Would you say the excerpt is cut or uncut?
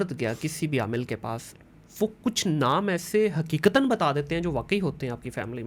uncut